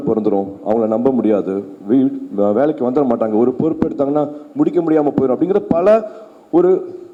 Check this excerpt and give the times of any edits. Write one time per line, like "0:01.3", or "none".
none